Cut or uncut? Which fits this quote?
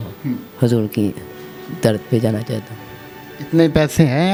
uncut